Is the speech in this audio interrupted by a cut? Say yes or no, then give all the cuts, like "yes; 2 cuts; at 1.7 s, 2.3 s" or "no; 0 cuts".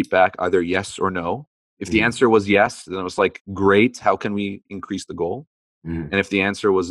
no; 0 cuts